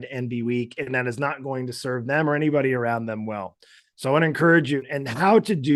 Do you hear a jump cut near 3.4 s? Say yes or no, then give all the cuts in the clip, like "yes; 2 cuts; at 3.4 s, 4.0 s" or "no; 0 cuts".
no; 1 cut; at 4.8 s